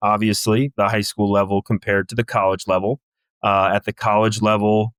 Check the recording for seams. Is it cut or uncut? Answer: uncut